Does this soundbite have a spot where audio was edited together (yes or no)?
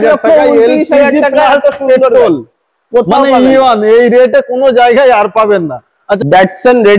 no